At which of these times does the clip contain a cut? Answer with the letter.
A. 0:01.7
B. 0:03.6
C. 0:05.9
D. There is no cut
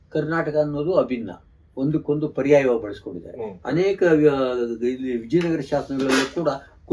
D